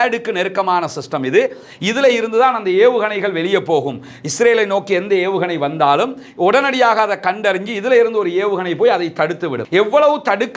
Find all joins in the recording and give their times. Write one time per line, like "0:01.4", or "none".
0:09.6